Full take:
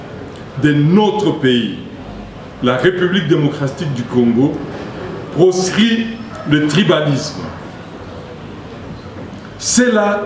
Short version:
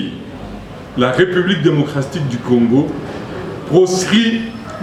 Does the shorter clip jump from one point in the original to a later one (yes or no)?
no